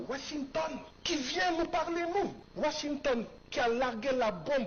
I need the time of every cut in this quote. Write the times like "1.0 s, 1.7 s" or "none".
0.9 s, 2.4 s, 3.4 s

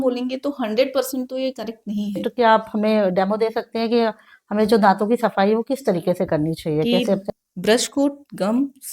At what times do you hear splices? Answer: 2.2 s, 7.2 s

